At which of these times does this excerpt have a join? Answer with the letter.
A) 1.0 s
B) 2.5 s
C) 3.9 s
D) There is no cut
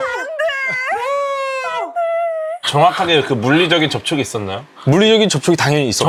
D